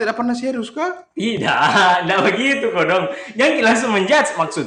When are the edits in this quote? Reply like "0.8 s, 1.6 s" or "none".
none